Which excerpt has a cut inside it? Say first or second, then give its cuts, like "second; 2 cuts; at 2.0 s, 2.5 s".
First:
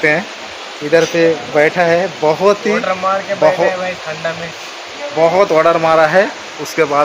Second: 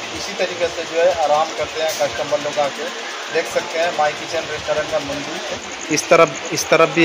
second; 1 cut; at 5.7 s